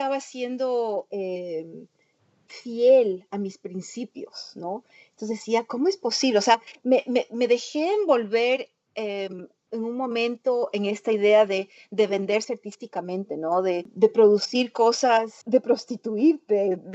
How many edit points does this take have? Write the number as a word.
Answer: two